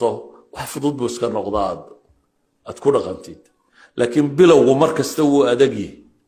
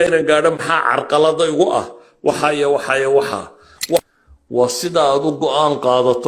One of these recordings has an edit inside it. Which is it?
second; 1 cut; at 4.0 s

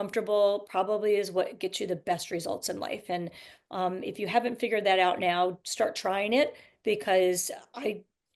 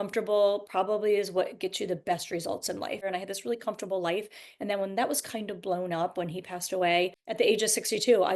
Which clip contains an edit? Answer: second; 2 cuts; at 3.1 s, 7.2 s

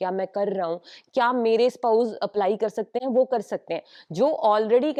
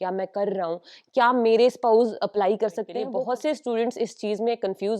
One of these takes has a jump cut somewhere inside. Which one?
second; 1 cut; at 3.0 s

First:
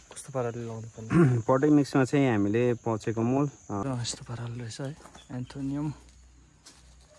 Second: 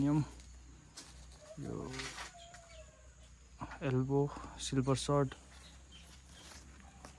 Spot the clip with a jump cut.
first; 1 cut; at 3.8 s

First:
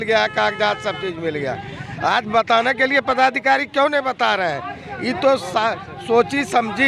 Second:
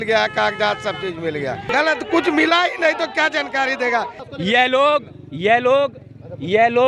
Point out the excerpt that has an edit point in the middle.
second; 2 cuts; at 1.7 s, 4.2 s

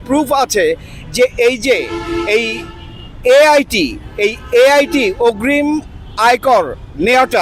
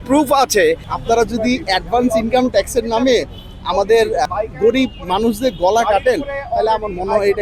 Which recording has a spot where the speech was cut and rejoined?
second; 2 cuts; at 0.9 s, 4.2 s

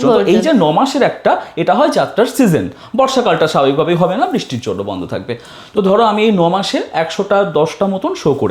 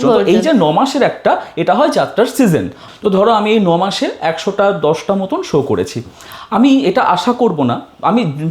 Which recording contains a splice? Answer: second; 1 cut; at 2.8 s

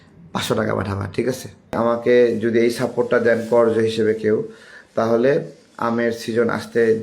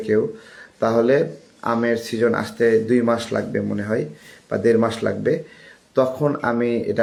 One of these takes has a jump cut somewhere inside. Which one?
first; 1 cut; at 1.8 s

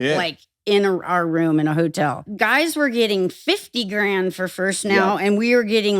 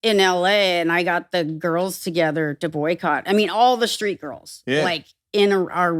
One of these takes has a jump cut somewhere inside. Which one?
first; 1 cut; at 2.3 s

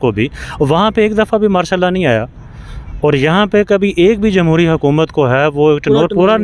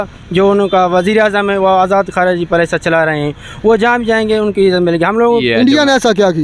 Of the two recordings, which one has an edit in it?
second; 1 cut; at 5.3 s

